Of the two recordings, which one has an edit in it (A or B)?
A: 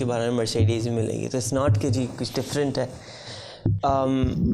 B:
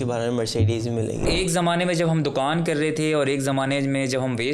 B